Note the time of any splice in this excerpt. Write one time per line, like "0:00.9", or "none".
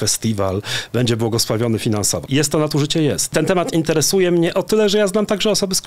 0:02.2
0:03.3